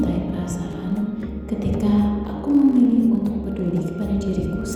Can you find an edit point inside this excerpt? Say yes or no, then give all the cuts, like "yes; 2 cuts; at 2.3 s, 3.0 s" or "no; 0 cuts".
no; 0 cuts